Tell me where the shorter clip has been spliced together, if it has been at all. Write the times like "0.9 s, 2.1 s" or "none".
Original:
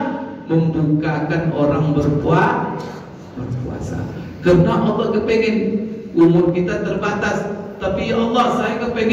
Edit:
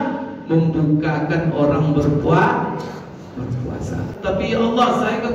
4.1 s